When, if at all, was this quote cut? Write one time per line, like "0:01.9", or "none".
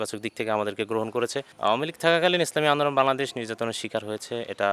0:01.5